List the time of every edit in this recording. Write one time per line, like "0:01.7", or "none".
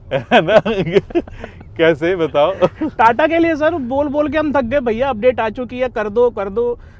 none